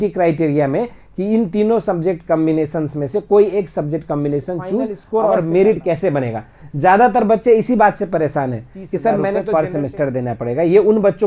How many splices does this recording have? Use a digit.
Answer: 2